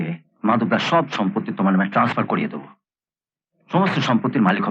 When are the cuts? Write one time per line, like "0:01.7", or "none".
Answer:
none